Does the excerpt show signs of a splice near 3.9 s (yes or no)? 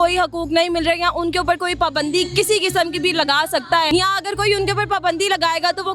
yes